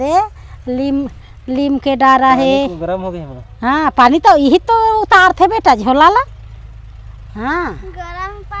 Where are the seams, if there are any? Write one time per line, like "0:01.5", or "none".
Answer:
none